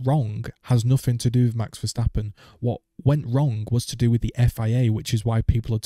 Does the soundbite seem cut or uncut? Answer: uncut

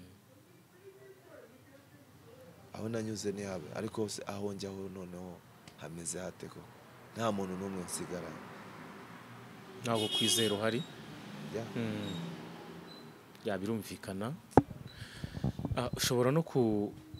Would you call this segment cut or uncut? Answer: uncut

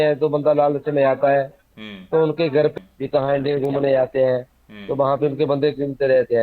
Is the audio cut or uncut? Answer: cut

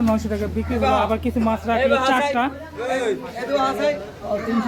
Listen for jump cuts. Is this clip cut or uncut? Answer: uncut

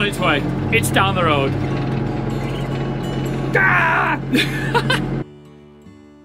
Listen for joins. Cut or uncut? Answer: uncut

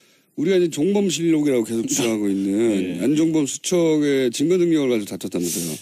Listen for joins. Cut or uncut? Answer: uncut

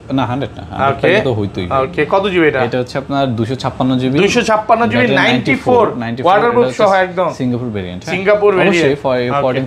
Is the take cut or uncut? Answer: uncut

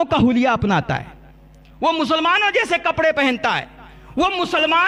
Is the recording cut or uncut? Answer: uncut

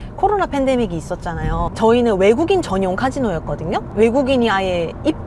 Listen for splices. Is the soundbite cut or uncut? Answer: uncut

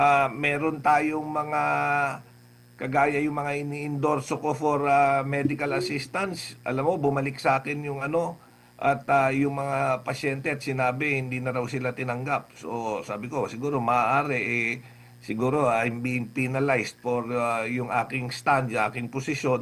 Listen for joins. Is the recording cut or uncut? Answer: uncut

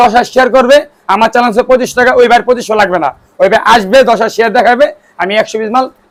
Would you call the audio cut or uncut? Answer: uncut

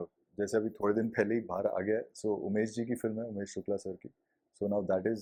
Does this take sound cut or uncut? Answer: uncut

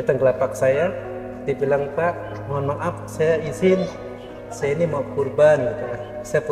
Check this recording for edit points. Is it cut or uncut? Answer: uncut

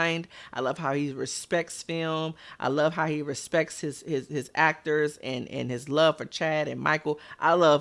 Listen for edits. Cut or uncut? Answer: uncut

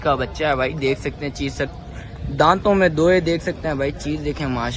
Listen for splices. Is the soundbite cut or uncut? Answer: uncut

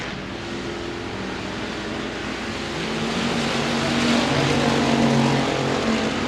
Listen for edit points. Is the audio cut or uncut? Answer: uncut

